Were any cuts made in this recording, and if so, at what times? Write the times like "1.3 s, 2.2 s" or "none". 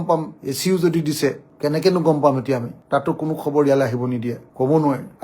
none